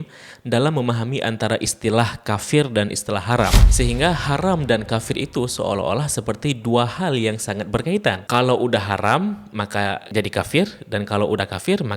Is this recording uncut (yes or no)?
no